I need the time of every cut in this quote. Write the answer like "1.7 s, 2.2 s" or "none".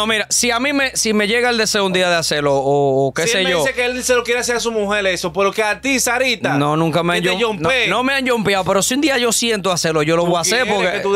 none